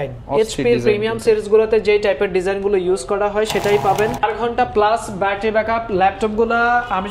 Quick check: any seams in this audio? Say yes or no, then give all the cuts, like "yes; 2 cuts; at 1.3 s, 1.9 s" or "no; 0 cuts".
yes; 1 cut; at 4.2 s